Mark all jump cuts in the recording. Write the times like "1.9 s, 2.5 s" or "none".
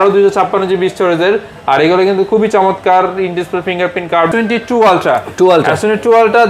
4.3 s